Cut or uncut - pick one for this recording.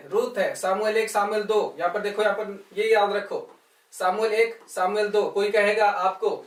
uncut